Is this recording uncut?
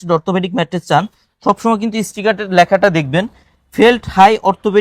yes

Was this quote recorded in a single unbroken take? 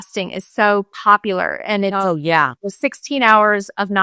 yes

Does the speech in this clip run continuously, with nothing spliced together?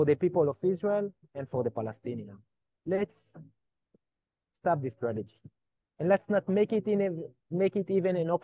yes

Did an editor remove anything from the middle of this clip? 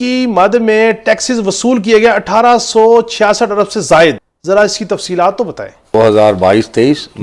yes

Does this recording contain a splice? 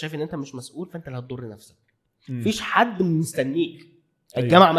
no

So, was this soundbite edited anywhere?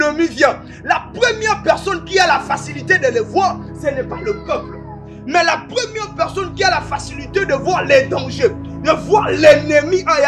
no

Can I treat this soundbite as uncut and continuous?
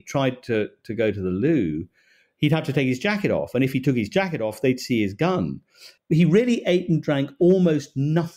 no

